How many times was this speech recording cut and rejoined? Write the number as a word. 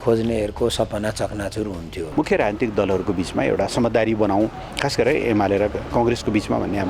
one